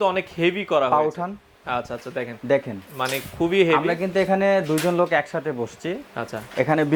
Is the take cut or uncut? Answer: uncut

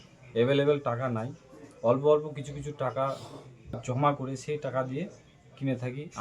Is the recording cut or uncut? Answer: cut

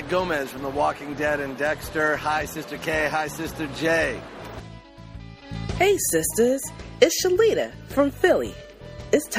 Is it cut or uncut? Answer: uncut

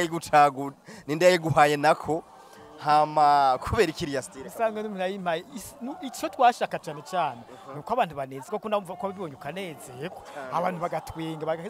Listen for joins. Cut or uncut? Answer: uncut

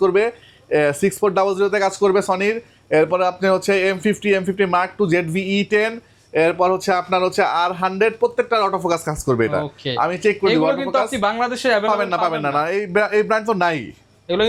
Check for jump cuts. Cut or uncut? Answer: uncut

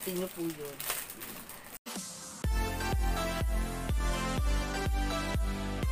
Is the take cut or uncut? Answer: cut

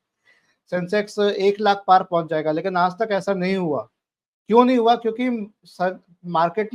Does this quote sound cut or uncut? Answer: uncut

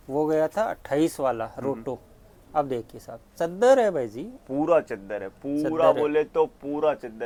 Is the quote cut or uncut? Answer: uncut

